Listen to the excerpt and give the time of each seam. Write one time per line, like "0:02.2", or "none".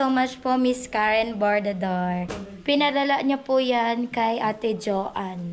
0:02.4